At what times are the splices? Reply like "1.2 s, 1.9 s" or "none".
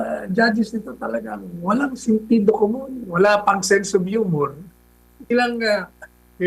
5.2 s